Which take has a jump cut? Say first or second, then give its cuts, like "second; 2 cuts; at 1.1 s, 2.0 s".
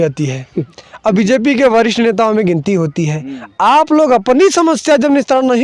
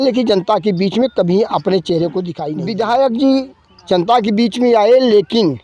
second; 1 cut; at 2.4 s